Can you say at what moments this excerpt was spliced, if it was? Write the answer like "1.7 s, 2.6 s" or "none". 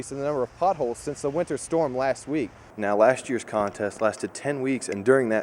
2.6 s